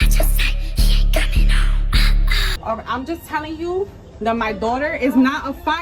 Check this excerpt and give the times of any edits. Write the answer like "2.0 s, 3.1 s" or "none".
2.4 s